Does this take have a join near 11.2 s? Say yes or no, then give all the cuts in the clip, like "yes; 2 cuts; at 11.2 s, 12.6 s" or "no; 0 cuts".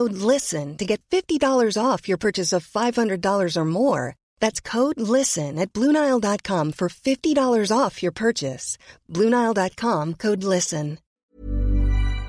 yes; 1 cut; at 11.2 s